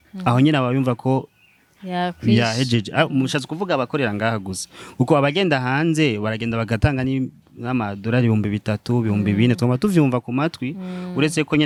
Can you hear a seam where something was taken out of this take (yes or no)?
no